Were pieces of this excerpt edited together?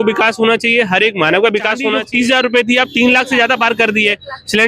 yes; 1 cut; at 1.9 s

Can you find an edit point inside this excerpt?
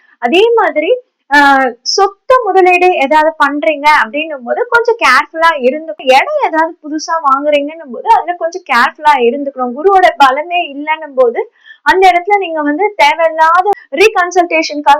yes; 2 cuts; at 6.0 s, 13.7 s

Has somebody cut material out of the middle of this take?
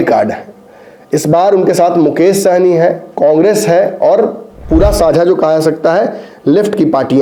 no; 0 cuts

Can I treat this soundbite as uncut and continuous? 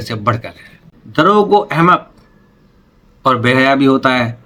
yes; 0 cuts

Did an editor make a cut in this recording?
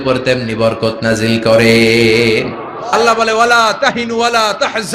yes; 1 cut; at 2.9 s

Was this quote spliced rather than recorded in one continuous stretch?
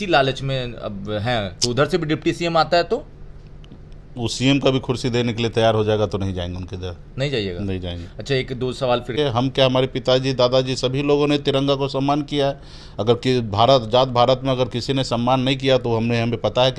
yes; 1 cut; at 9.2 s

